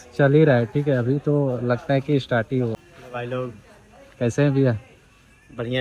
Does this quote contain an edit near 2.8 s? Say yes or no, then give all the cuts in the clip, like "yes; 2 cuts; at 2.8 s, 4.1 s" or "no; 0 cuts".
yes; 1 cut; at 2.8 s